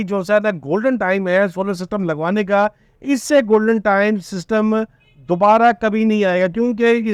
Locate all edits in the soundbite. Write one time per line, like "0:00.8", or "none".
none